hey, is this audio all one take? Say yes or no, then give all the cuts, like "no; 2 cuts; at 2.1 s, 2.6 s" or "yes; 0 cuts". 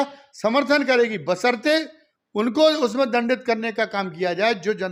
yes; 0 cuts